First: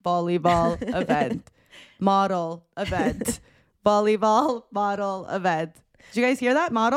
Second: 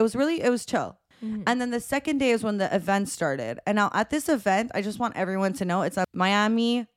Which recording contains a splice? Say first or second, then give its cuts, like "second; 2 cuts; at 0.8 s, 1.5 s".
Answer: second; 2 cuts; at 1.0 s, 6.1 s